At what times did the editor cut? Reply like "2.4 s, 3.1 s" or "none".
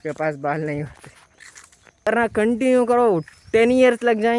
2.0 s